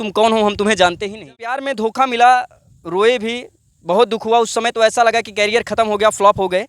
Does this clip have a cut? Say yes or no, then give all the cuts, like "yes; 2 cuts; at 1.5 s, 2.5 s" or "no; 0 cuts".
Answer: yes; 1 cut; at 1.6 s